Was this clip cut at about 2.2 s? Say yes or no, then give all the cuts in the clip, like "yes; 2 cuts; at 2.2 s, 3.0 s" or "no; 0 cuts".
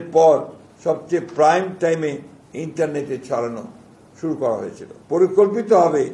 no; 1 cut; at 4.9 s